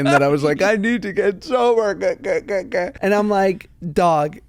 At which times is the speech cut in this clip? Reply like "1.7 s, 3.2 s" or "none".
2.9 s

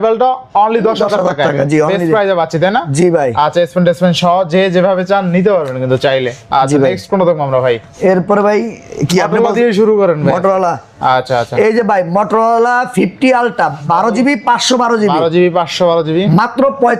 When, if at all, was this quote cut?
none

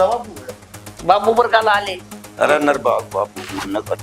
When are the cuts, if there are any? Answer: none

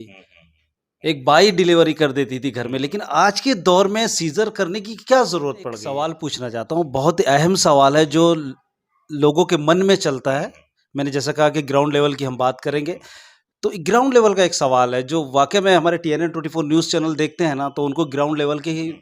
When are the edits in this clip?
5.8 s

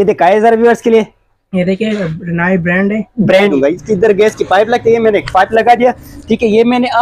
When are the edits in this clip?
3.4 s

